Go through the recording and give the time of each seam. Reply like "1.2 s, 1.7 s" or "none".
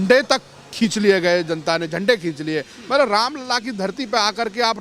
none